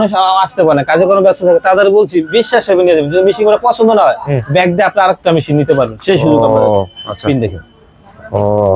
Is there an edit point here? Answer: no; 0 cuts

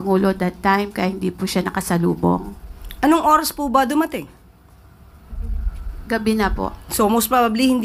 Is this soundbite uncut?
yes; 0 cuts

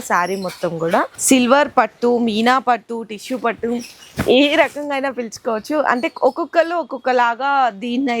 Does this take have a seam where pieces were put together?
yes; 1 cut; at 1.2 s

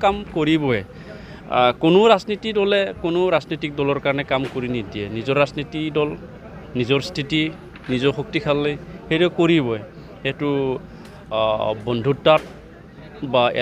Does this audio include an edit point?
no; 0 cuts

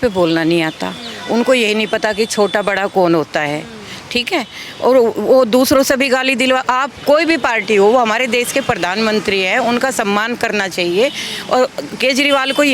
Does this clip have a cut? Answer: no; 0 cuts

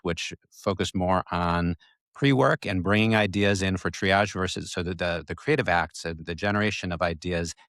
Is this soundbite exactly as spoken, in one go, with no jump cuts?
yes; 0 cuts

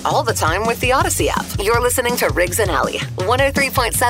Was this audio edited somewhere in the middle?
no; 0 cuts

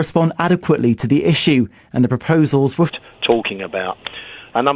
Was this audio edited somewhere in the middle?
no; 0 cuts

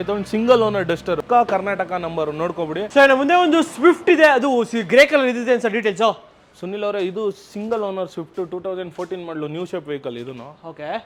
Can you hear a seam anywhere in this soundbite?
no; 0 cuts

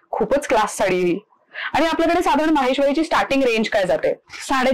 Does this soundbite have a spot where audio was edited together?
no; 0 cuts

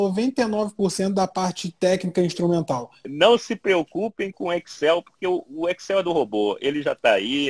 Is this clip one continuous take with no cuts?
no; 1 cut; at 3.1 s

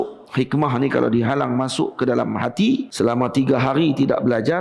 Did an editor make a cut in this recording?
yes; 1 cut; at 2.9 s

